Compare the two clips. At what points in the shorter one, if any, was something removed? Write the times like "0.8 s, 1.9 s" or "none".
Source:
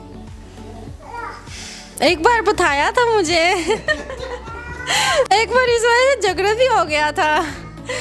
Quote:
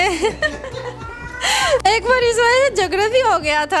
none

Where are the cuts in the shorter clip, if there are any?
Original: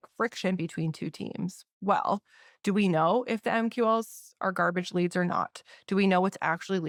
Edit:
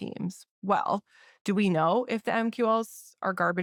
none

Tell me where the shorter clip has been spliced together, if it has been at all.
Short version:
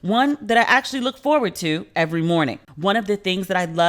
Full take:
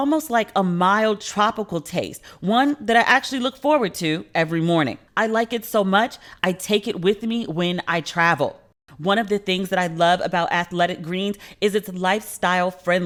2.6 s

